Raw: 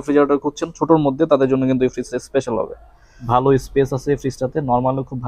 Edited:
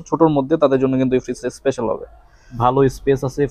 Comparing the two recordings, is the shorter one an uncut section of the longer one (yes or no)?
yes